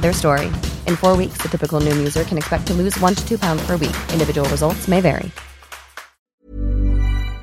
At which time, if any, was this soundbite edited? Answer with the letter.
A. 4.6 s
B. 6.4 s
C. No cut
B